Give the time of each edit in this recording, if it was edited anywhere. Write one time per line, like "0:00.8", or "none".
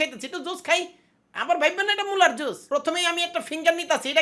0:02.5